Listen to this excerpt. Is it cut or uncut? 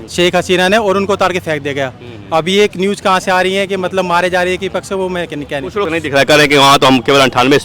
cut